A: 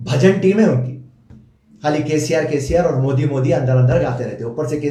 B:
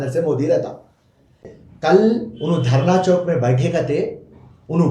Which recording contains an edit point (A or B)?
B